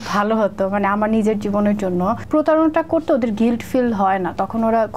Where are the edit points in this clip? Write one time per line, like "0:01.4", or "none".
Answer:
0:02.2